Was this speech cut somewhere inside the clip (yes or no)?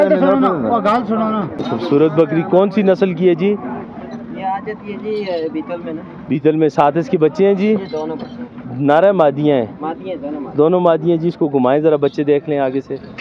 yes